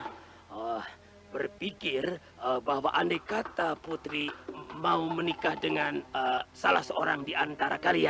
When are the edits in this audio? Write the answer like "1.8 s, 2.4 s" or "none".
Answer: none